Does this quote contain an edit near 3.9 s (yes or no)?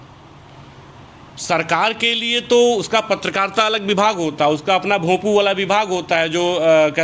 no